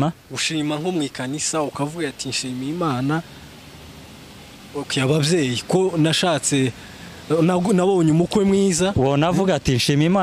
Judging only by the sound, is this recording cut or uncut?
uncut